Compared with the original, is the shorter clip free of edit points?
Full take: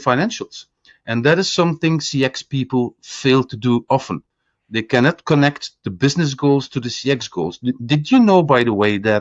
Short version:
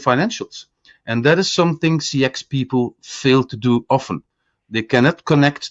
yes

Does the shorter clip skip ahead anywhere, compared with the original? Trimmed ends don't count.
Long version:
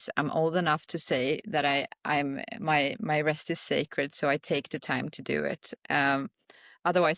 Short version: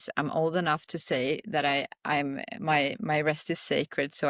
no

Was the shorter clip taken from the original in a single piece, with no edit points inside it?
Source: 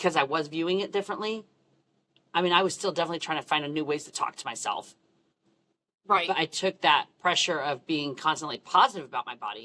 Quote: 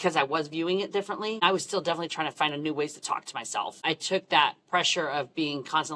no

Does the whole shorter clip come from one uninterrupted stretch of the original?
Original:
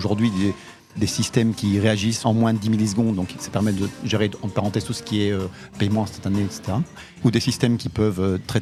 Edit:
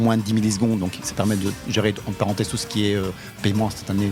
yes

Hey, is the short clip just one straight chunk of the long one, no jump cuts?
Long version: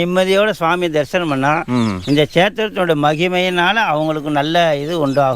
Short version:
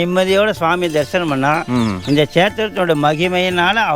yes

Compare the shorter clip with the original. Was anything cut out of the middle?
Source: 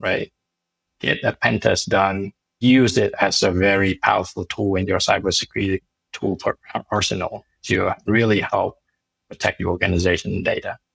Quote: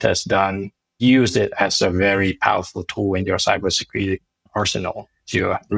yes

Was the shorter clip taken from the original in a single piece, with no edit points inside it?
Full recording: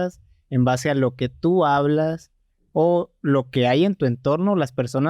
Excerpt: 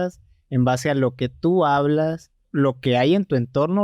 no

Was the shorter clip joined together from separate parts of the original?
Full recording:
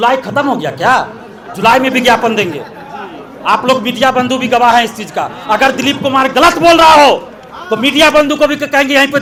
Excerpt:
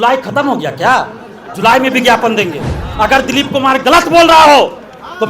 yes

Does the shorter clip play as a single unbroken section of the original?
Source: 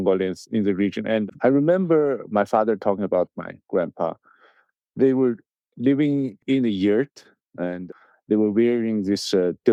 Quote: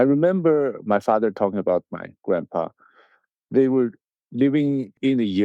yes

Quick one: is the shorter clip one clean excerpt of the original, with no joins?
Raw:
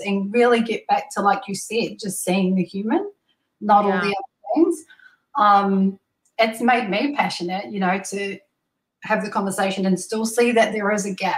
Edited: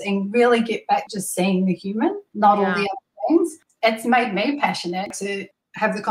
no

